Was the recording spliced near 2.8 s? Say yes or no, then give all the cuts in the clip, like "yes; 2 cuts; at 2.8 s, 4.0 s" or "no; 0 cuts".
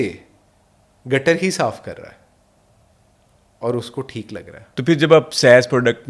no; 1 cut; at 4.7 s